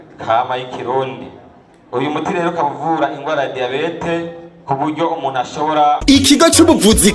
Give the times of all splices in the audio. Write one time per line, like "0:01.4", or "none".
0:06.0